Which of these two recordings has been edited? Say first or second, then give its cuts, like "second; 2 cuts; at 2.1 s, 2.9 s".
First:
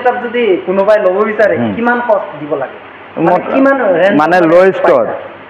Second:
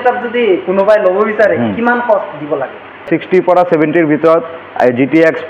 second; 1 cut; at 3.1 s